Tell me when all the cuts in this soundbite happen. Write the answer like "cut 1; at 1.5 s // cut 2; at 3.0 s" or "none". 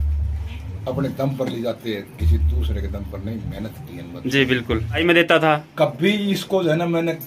cut 1; at 5.0 s